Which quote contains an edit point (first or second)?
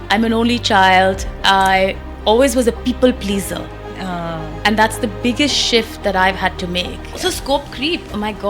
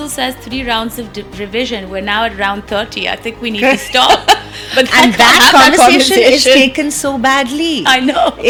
first